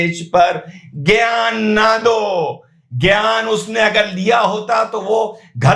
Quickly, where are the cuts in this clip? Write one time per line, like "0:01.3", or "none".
none